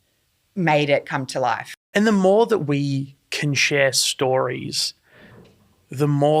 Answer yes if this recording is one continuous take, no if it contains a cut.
no